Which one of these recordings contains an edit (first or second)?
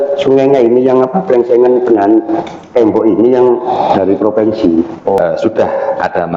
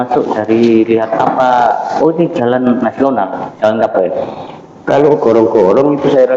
first